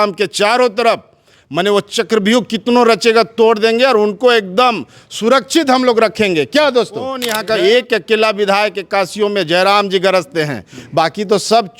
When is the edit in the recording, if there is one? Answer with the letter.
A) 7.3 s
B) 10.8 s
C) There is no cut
A